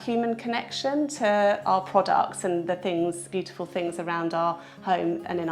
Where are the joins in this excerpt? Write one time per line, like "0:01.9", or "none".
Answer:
0:03.2